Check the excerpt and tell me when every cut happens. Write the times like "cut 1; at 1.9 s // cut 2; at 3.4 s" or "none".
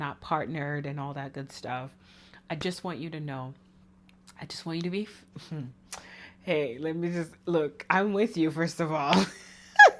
none